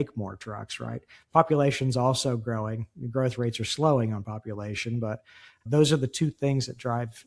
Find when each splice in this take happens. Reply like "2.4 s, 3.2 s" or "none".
5.7 s